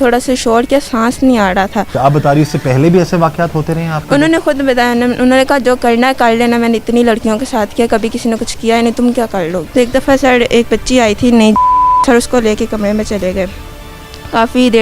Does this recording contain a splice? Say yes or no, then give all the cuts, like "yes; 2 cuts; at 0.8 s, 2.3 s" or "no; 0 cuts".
yes; 2 cuts; at 1.9 s, 9.6 s